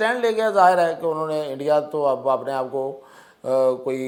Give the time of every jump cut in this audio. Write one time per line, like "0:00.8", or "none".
none